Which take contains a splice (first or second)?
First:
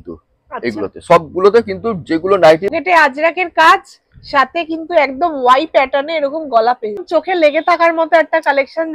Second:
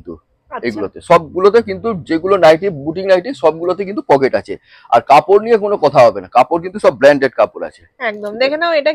first